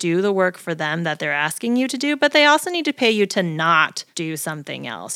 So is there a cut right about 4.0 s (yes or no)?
yes